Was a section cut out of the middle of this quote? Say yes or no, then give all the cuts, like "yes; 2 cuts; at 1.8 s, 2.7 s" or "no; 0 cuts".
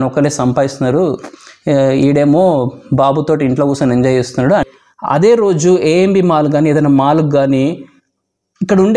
yes; 1 cut; at 4.6 s